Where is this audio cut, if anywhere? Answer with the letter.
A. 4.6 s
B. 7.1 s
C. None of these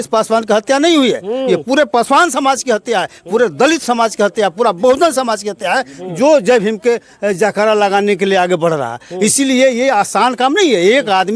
C